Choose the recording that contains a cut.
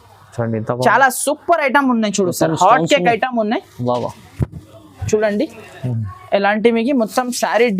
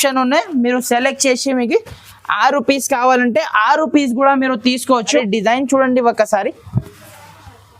second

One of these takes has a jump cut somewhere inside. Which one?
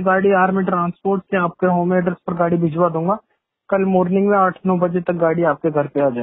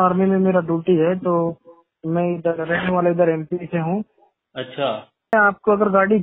second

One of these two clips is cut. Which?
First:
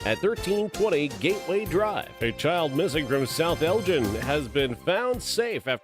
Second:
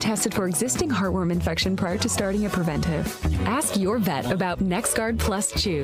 first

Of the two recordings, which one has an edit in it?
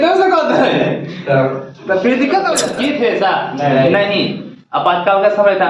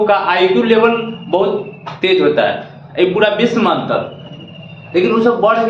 first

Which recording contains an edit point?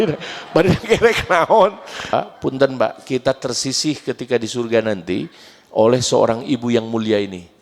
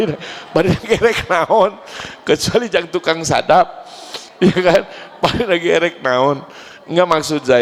first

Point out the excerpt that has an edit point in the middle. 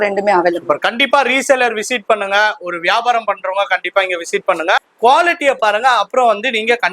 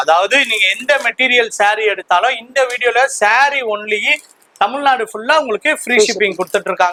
first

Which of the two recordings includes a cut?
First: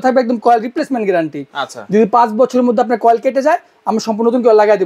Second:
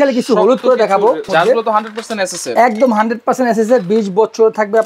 second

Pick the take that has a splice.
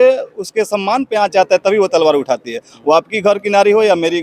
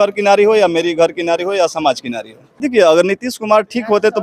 second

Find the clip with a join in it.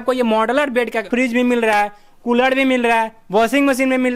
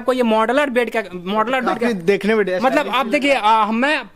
first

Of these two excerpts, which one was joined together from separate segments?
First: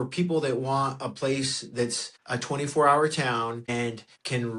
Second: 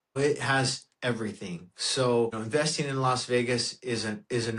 first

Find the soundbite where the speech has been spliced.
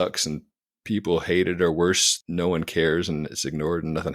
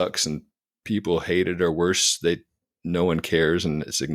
first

